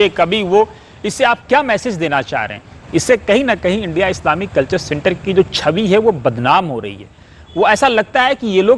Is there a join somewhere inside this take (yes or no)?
no